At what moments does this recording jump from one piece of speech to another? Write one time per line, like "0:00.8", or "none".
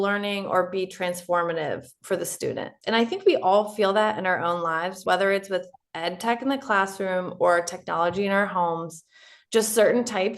0:02.7
0:05.0